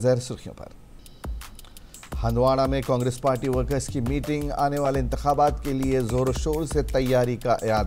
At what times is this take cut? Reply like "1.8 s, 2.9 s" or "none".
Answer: 1.0 s